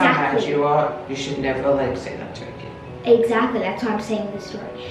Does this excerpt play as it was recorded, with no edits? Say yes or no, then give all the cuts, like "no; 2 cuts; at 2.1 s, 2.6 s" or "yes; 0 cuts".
yes; 0 cuts